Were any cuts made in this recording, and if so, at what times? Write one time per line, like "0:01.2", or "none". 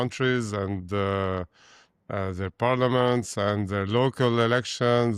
none